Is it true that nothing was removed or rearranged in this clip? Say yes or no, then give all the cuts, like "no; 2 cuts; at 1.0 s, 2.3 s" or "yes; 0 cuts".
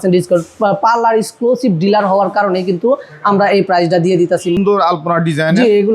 no; 1 cut; at 4.6 s